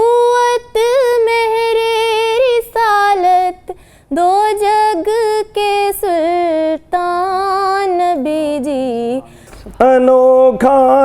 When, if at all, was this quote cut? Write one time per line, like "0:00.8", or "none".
0:09.4